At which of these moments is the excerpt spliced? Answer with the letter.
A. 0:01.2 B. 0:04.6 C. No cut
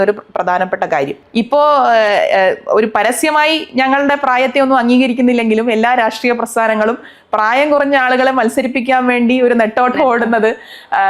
A